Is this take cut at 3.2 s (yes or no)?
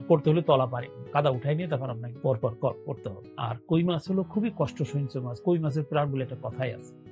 yes